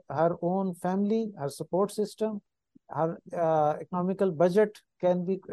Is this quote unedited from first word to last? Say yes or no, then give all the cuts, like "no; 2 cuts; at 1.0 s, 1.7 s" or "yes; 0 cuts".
yes; 0 cuts